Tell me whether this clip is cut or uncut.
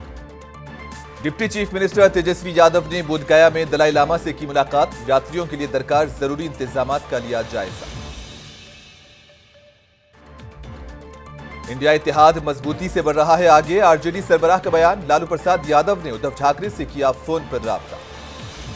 cut